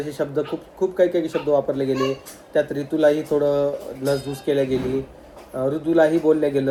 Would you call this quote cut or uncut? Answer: uncut